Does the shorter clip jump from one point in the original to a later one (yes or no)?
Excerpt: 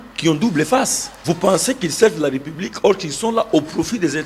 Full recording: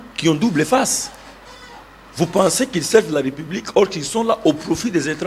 yes